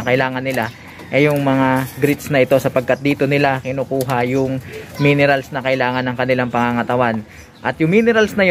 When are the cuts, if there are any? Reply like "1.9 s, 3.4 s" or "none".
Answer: none